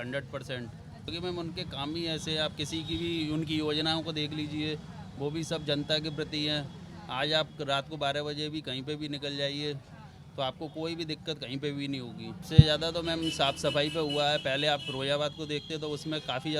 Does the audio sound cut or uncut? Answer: cut